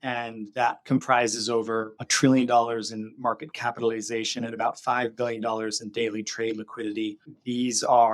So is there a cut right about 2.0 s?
yes; 1 cut; at 2.0 s

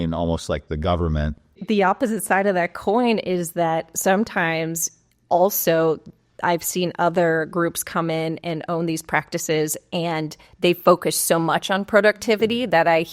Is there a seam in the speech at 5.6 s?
no; 1 cut; at 1.6 s

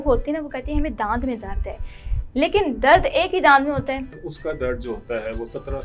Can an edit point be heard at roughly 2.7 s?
no; 1 cut; at 4.2 s

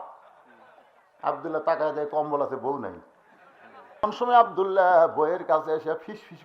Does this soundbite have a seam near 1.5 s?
no; 1 cut; at 4.1 s

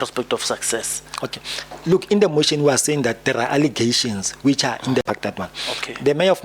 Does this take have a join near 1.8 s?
no; 1 cut; at 5.1 s

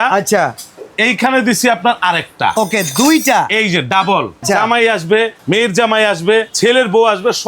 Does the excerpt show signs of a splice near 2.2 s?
no; 3 cuts; at 4.4 s, 5.4 s, 6.5 s

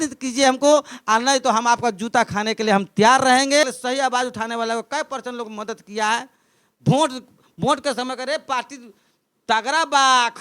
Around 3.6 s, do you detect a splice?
yes; 1 cut; at 3.6 s

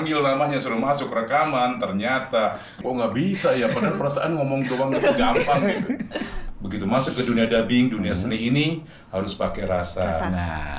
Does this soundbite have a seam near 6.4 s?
yes; 2 cuts; at 2.8 s, 6.4 s

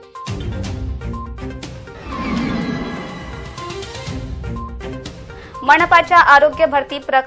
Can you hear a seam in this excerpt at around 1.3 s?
yes; 1 cut; at 1.3 s

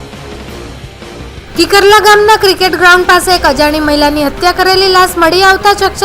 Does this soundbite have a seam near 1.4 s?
yes; 1 cut; at 1.4 s

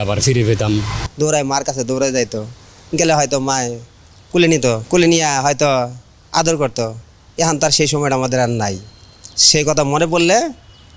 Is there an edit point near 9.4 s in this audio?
no; 2 cuts; at 1.0 s, 4.8 s

